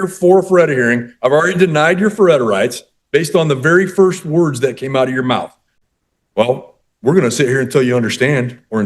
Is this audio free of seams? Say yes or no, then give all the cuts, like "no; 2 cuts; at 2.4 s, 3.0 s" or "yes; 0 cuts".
no; 1 cut; at 5.6 s